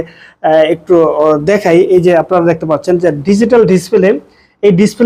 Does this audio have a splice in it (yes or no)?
no